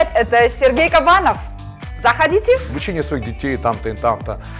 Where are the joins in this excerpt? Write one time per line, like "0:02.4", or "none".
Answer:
0:02.7